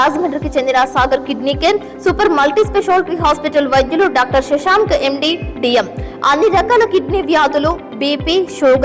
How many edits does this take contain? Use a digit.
0